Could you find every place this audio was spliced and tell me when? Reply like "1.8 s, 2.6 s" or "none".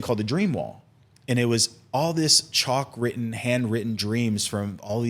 none